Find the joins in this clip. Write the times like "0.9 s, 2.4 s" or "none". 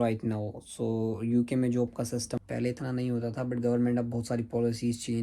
2.3 s